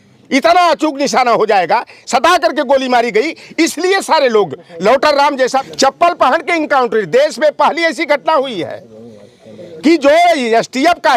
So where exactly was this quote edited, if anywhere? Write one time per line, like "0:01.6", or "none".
0:05.6